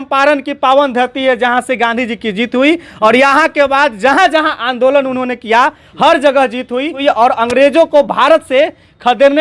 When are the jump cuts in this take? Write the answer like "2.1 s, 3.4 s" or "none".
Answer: 7.0 s